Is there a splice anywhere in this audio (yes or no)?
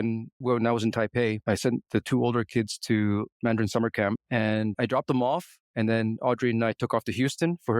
yes